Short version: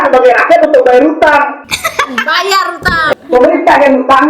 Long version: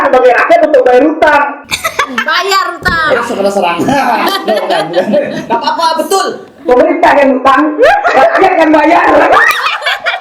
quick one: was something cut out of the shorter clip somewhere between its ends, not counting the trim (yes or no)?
yes